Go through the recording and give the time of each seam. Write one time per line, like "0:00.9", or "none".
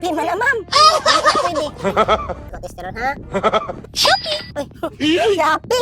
0:02.5